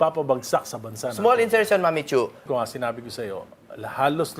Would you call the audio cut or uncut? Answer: cut